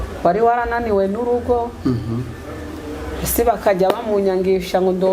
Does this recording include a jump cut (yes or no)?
no